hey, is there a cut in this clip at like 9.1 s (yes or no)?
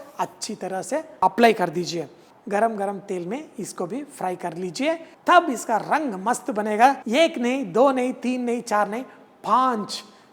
no